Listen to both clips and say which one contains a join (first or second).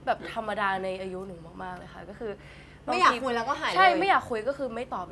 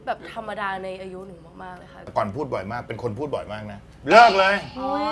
second